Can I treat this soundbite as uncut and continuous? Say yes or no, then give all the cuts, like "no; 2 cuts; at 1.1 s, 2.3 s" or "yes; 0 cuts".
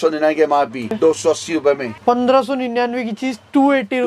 no; 2 cuts; at 1.0 s, 1.9 s